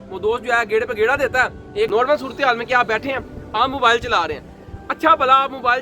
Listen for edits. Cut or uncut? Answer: cut